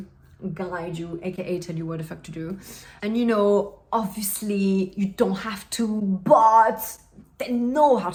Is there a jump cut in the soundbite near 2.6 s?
no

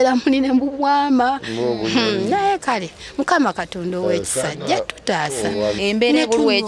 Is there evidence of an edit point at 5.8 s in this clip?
yes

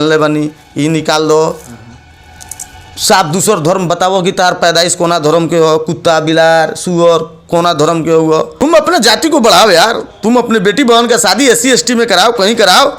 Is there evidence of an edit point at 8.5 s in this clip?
yes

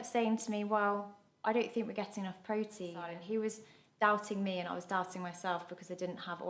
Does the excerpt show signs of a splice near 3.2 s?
yes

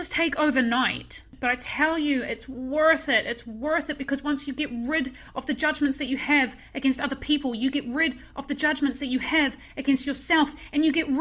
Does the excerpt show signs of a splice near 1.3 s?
yes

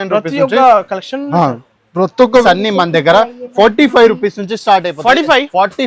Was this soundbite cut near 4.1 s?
no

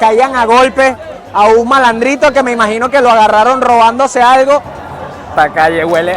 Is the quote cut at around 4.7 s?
yes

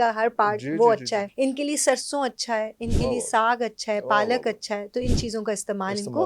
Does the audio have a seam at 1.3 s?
yes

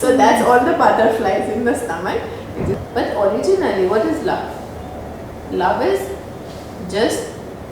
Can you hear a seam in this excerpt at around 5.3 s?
no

